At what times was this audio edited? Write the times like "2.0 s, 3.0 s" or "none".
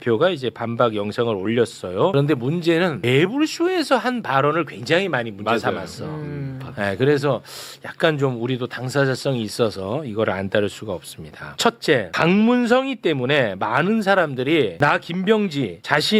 none